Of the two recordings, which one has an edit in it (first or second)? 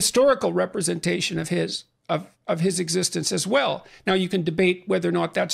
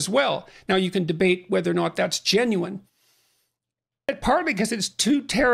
second